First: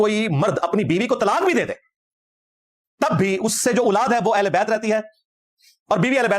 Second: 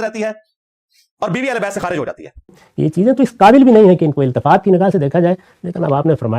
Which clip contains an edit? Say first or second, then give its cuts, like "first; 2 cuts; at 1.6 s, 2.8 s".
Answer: second; 1 cut; at 2.6 s